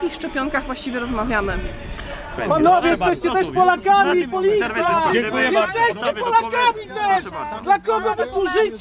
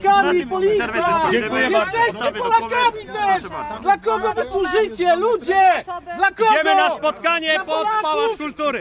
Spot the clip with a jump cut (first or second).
first